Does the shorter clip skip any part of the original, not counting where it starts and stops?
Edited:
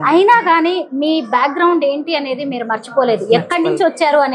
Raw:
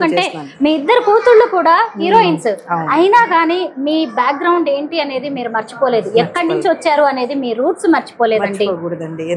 no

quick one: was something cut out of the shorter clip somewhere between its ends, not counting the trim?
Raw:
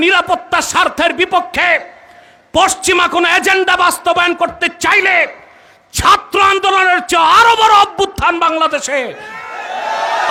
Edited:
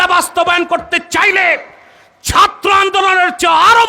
no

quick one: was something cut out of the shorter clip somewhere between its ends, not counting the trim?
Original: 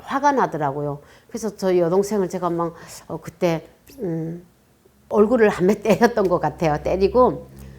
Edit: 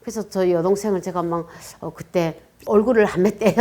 yes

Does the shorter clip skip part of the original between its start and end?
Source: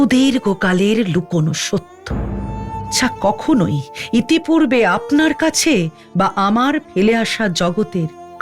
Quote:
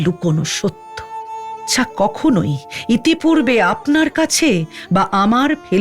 yes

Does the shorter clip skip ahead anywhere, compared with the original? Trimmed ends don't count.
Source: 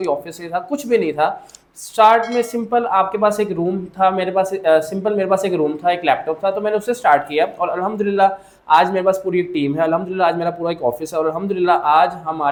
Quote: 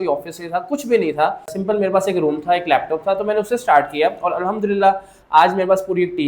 yes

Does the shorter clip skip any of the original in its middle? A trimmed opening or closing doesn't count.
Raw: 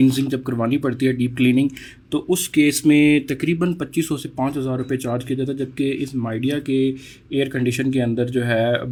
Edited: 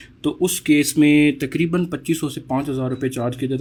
no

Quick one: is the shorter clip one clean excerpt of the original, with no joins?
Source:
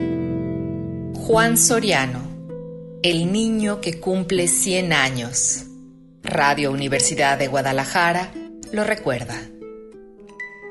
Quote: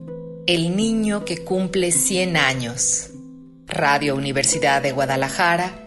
yes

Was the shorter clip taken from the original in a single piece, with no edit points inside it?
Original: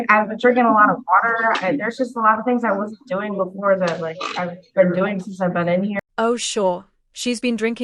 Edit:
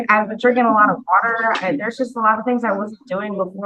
yes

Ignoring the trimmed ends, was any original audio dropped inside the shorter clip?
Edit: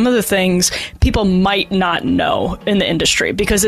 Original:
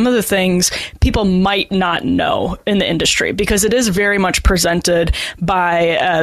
no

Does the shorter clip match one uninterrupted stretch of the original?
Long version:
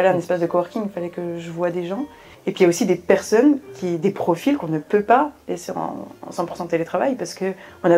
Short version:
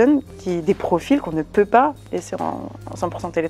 yes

